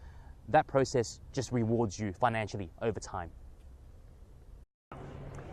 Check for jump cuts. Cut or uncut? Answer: uncut